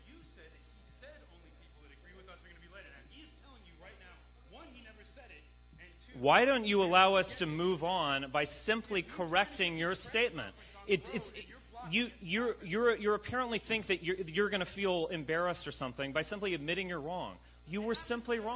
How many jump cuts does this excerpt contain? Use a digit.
0